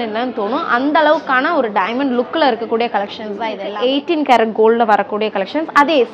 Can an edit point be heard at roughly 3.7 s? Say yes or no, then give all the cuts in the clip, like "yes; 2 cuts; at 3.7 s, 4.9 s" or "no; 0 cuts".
yes; 1 cut; at 3.7 s